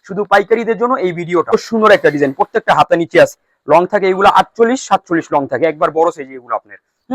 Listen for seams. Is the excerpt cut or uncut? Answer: cut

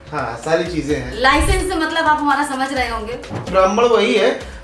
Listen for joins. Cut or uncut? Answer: cut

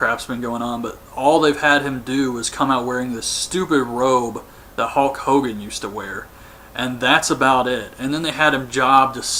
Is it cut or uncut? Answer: uncut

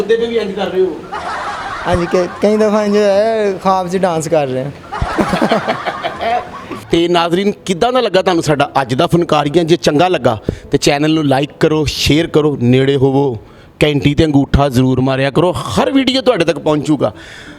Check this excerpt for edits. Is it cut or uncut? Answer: uncut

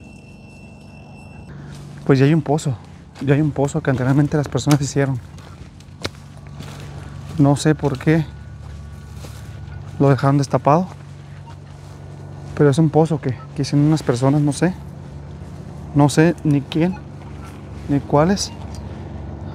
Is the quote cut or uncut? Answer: cut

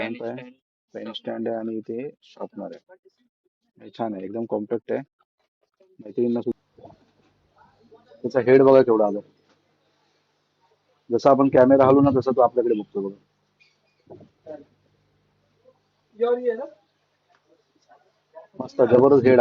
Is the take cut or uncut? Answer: cut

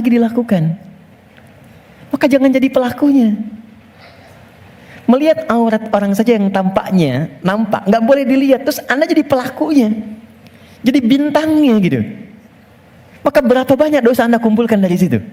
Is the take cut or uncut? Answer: uncut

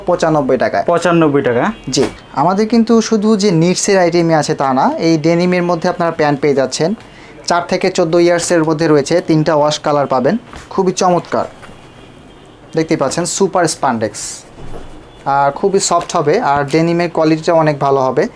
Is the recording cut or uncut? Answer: uncut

